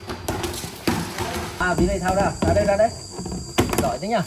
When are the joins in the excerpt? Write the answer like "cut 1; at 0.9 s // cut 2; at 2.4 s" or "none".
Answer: cut 1; at 1.6 s